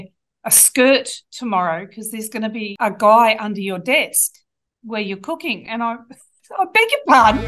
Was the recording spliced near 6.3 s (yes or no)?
yes